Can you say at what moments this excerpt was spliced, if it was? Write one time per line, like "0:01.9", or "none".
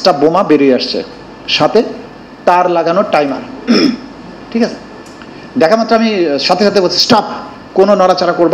none